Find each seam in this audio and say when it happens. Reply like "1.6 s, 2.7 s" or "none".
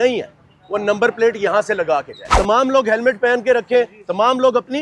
2.2 s